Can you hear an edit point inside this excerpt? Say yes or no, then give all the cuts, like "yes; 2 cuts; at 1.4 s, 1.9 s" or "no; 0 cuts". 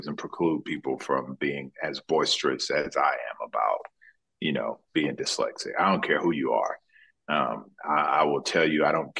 no; 0 cuts